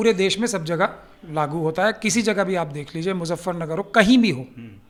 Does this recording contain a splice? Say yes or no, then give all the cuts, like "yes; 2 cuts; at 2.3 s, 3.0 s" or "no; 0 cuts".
no; 0 cuts